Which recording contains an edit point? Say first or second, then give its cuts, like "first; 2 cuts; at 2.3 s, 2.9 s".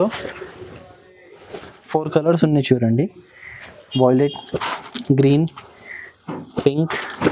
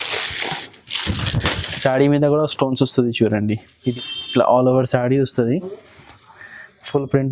second; 1 cut; at 3.9 s